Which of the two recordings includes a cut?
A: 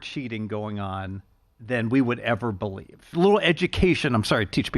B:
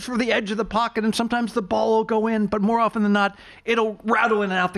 A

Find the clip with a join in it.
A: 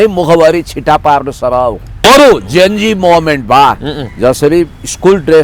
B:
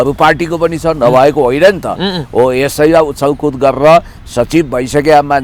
A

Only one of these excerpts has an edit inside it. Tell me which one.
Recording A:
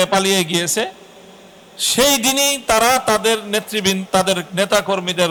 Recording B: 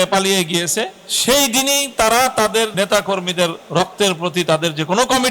B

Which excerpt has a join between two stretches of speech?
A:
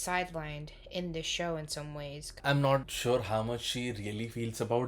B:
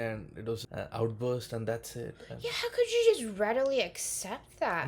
A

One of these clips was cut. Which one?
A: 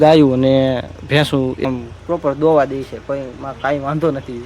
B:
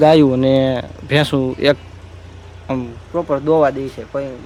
A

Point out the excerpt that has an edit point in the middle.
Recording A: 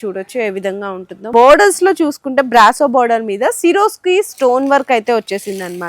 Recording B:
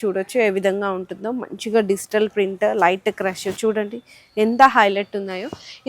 A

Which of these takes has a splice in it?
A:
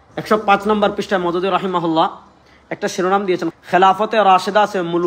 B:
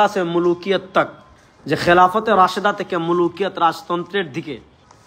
A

